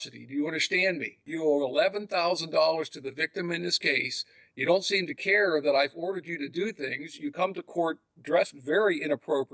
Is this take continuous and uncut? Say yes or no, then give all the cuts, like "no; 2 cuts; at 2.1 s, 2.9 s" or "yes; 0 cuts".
no; 1 cut; at 1.2 s